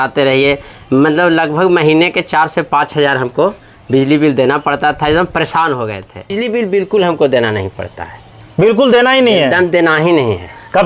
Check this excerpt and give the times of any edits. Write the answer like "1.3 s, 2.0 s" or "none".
6.4 s